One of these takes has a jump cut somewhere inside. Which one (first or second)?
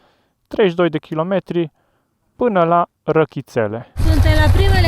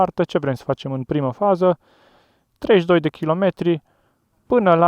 first